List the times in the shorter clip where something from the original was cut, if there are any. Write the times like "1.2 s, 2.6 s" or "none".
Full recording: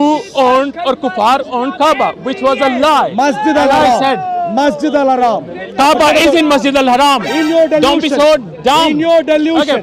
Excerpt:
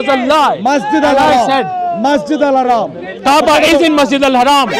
none

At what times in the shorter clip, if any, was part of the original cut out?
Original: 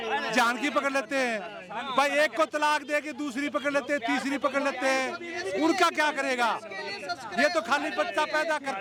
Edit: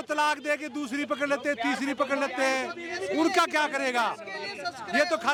none

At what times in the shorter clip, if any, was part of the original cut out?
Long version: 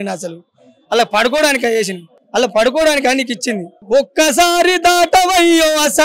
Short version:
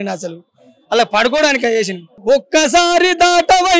2.1 s

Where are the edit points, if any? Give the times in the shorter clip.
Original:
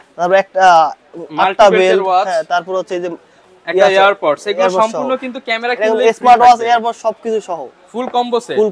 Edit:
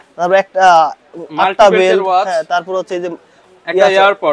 none

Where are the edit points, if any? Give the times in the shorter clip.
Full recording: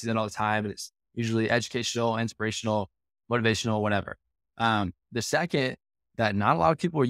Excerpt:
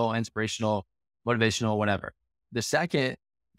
2.4 s

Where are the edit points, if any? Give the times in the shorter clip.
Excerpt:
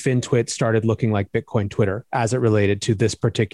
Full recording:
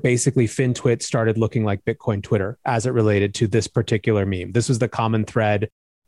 none

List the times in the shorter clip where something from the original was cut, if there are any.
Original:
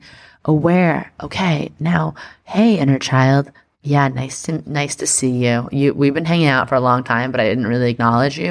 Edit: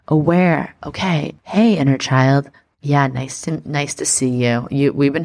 1.3 s

